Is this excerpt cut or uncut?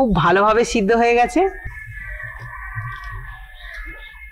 cut